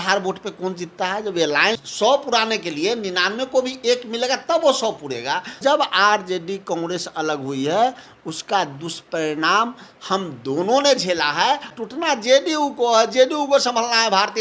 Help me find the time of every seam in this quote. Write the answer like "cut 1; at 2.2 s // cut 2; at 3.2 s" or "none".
cut 1; at 1.8 s // cut 2; at 5.6 s // cut 3; at 11.7 s